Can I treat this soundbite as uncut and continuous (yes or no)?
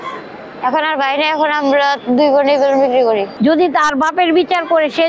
no